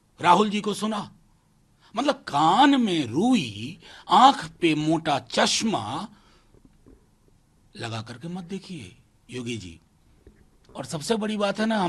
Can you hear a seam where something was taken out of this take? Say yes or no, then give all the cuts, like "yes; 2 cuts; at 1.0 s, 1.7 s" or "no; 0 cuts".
no; 0 cuts